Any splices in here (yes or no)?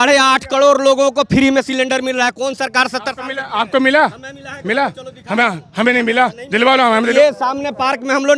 yes